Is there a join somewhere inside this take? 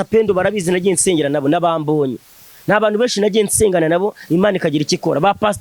no; 0 cuts

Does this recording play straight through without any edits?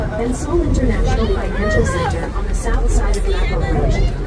yes; 0 cuts

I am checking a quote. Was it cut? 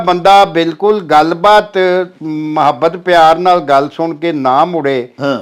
no; 0 cuts

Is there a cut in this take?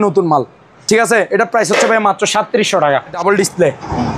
yes; 1 cut; at 3.2 s

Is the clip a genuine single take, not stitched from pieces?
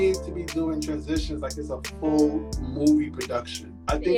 yes; 0 cuts

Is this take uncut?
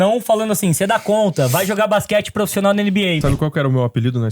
no; 1 cut; at 3.2 s

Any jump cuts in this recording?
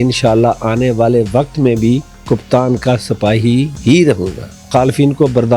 yes; 3 cuts; at 2.1 s, 3.7 s, 4.6 s

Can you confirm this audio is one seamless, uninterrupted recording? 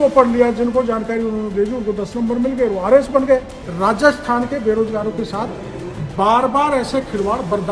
no; 1 cut; at 3.6 s

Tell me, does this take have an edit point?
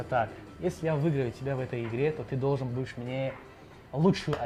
no; 0 cuts

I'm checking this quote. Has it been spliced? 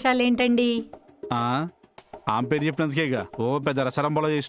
no; 0 cuts

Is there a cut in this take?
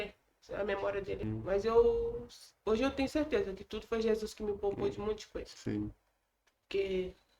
yes; 1 cut; at 1.2 s

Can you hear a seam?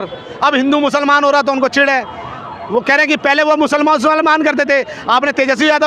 no; 0 cuts

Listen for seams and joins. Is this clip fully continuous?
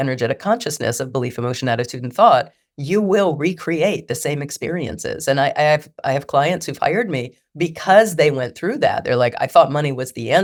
yes; 0 cuts

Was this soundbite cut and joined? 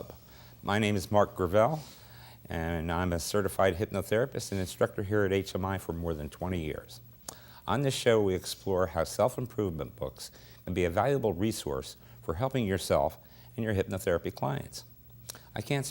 no; 0 cuts

